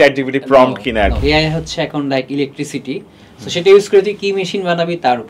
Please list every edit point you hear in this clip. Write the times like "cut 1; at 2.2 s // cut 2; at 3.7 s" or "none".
cut 1; at 1.2 s

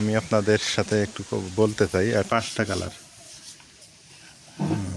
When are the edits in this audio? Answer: cut 1; at 2.3 s

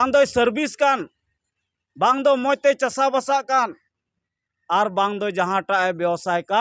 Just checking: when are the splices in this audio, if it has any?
none

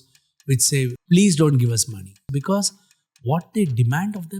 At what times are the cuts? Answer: cut 1; at 1.0 s // cut 2; at 2.3 s

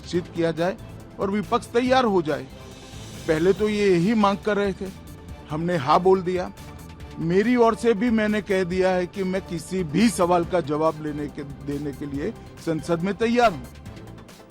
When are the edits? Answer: cut 1; at 13.6 s

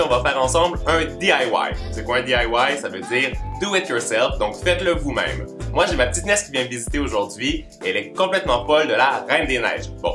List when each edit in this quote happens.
none

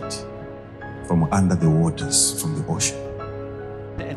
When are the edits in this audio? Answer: none

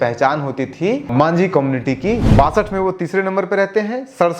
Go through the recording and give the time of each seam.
cut 1; at 1.1 s // cut 2; at 2.2 s

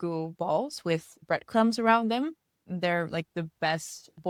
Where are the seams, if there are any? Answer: none

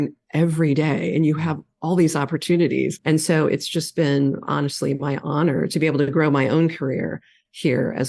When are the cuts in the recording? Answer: none

